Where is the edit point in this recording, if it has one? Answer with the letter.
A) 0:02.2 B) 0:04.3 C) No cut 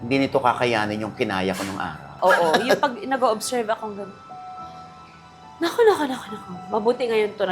A